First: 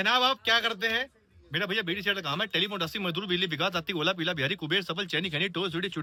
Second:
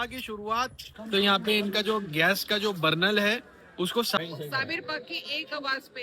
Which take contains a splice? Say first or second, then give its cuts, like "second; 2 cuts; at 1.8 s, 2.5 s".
second; 2 cuts; at 0.9 s, 4.2 s